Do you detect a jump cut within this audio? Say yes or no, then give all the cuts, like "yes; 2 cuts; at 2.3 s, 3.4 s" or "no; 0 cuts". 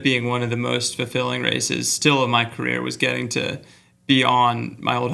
no; 0 cuts